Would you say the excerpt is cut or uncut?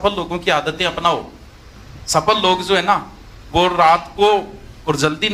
uncut